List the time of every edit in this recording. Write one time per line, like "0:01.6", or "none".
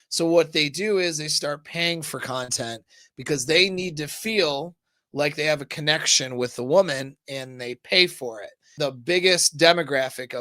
0:08.6